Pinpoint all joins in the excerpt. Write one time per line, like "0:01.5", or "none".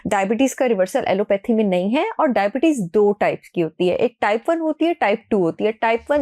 none